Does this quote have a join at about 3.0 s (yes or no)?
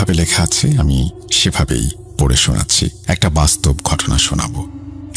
yes